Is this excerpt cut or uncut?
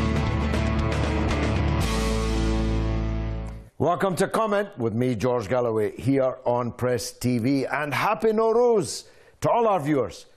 cut